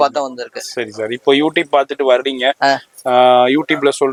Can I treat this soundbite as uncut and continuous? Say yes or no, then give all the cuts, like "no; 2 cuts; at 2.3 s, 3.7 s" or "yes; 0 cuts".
yes; 0 cuts